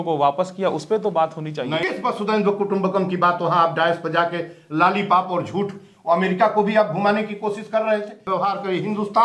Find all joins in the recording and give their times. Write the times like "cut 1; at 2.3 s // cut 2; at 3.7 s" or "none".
cut 1; at 1.8 s // cut 2; at 8.3 s